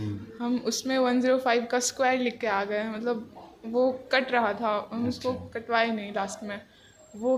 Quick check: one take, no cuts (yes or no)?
yes